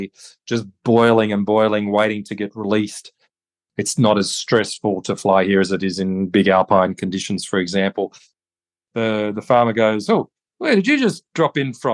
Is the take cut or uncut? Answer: cut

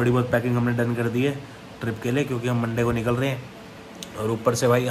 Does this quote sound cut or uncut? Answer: uncut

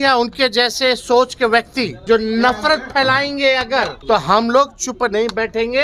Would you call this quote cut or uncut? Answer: cut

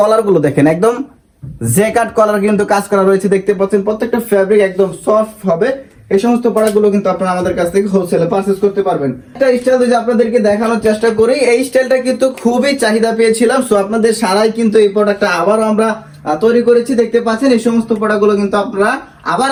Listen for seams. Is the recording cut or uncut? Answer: uncut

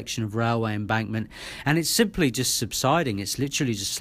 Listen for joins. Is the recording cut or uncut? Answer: uncut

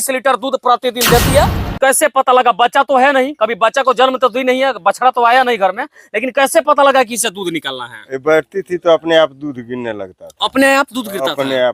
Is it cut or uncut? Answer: cut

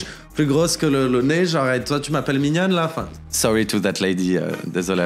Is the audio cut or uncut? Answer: cut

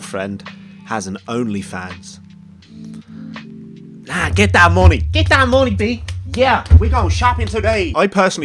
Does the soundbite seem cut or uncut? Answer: uncut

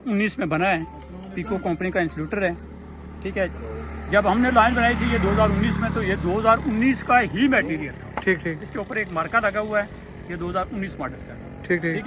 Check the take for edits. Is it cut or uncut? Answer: uncut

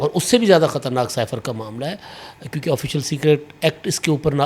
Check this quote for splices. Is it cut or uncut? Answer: uncut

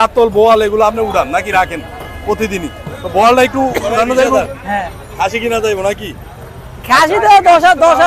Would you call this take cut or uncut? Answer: cut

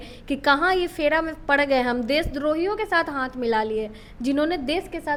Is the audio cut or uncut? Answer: uncut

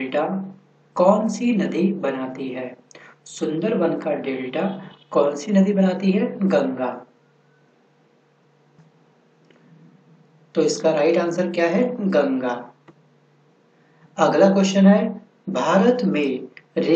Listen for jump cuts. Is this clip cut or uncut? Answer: uncut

